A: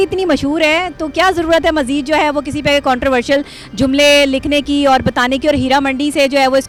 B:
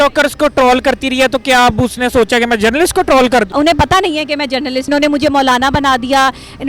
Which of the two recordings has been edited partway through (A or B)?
B